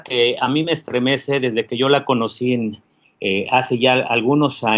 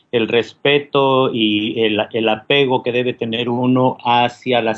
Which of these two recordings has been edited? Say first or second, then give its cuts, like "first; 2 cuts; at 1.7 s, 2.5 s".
second; 1 cut; at 2.4 s